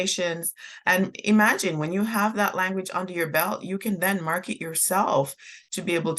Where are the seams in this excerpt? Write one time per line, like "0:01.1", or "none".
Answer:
none